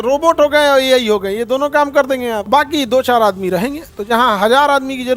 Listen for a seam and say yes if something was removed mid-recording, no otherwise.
no